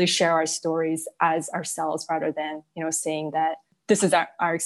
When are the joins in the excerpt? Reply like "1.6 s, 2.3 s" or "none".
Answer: 3.7 s